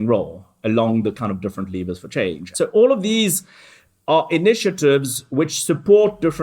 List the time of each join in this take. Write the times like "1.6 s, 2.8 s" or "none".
2.5 s